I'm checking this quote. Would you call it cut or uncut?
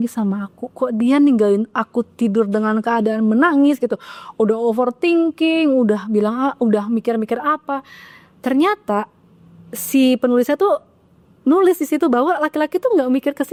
uncut